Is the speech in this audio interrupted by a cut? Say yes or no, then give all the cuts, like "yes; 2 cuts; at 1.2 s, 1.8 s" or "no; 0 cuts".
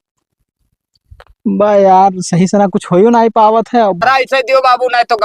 yes; 1 cut; at 4.0 s